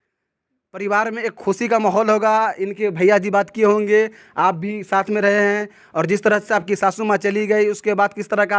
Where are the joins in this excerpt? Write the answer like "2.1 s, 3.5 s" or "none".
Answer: none